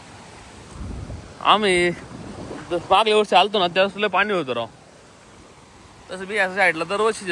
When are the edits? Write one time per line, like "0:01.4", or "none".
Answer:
none

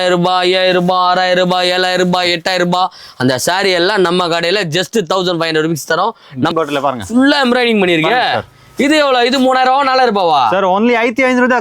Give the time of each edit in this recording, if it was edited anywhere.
0:06.5

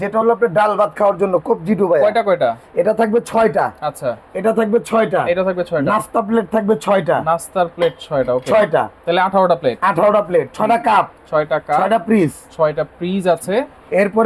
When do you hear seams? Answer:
none

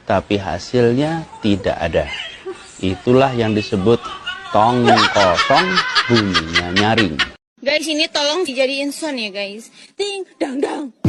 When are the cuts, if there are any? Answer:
none

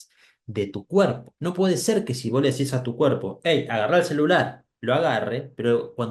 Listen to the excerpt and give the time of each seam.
0:01.3

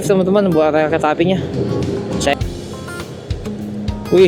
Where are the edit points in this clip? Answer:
0:02.3

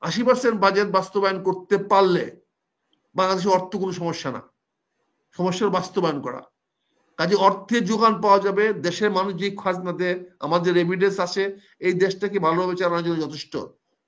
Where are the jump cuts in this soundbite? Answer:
none

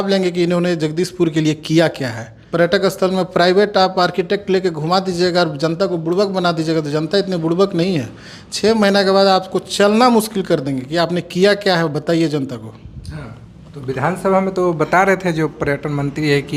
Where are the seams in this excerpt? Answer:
none

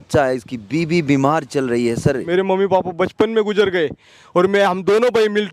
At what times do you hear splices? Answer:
0:02.2

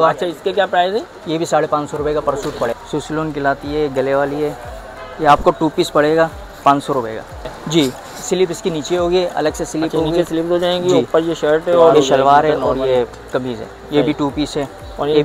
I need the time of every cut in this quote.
0:02.7
0:07.6
0:11.9

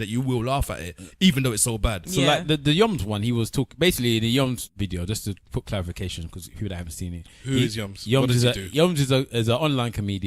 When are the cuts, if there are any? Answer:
0:04.7

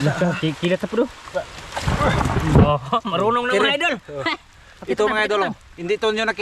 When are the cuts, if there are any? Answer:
0:02.7

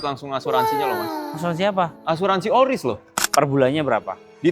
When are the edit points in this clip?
0:03.2

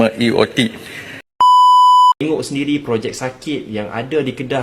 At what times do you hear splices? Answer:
0:01.4
0:02.2

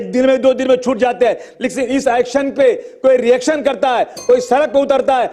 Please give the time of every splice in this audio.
none

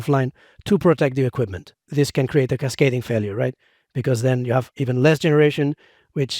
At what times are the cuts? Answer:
0:01.8

